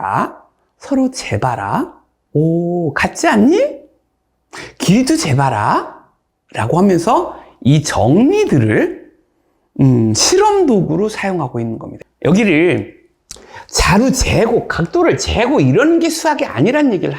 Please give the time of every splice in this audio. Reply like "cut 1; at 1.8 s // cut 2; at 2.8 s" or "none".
cut 1; at 11.8 s